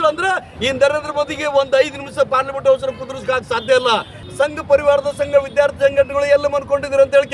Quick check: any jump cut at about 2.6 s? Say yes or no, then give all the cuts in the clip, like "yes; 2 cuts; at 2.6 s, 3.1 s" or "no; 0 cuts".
no; 1 cut; at 4.2 s